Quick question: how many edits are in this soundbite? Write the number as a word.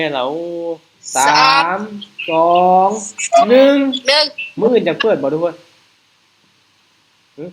one